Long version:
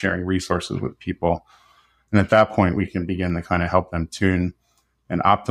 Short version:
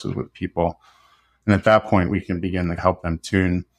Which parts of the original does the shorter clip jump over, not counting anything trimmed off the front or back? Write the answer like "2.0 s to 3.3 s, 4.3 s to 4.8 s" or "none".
3.4 s to 3.7 s